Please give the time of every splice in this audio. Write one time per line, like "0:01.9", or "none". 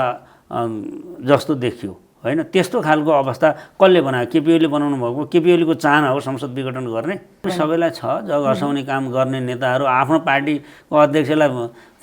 0:07.5